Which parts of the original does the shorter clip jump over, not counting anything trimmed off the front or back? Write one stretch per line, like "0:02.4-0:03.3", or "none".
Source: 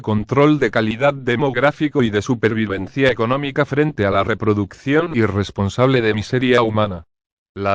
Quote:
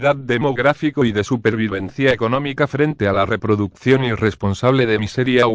0:04.9-0:05.0